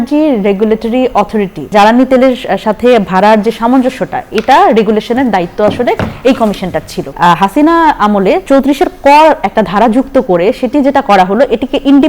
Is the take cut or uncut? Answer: cut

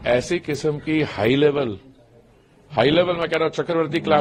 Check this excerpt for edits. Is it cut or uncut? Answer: uncut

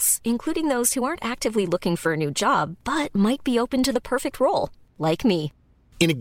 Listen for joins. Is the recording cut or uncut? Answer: uncut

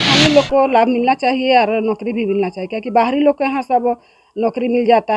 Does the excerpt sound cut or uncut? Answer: uncut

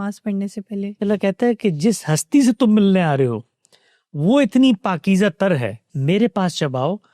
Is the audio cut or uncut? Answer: cut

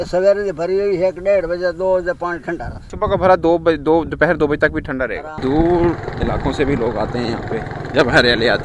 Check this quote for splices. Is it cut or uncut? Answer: cut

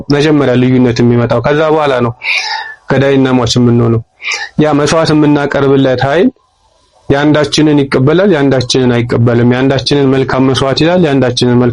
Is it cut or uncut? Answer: uncut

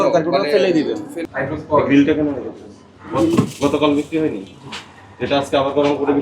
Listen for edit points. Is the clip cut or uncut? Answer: cut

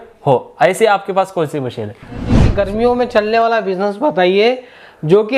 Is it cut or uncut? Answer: cut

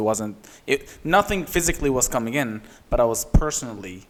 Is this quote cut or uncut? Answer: uncut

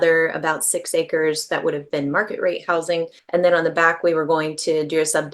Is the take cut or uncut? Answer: cut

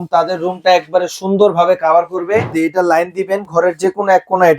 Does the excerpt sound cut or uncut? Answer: cut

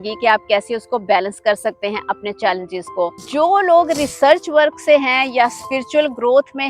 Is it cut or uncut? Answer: cut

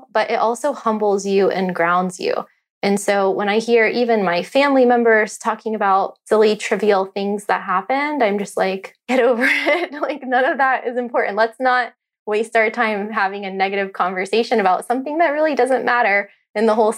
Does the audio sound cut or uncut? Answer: uncut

